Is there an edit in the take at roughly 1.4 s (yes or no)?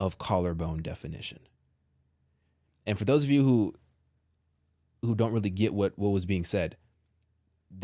no